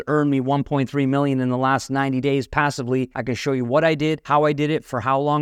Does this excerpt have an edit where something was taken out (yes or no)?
yes